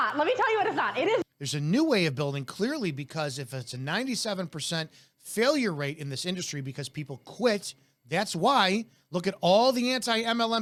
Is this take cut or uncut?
uncut